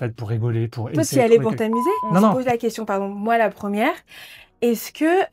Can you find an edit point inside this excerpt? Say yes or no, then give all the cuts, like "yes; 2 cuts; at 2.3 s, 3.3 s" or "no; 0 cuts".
yes; 1 cut; at 2.3 s